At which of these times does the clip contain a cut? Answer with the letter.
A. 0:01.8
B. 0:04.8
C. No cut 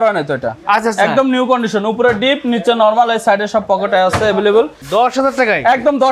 B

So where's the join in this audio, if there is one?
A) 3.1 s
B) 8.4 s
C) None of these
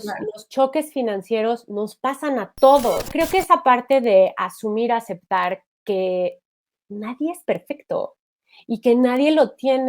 A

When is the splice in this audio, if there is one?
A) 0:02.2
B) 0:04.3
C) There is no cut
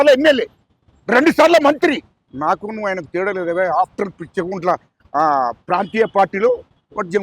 A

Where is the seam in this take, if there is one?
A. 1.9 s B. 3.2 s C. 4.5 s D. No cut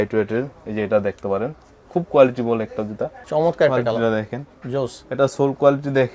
B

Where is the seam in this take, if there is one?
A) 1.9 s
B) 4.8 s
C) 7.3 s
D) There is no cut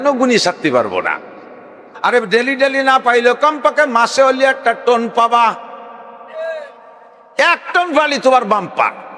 A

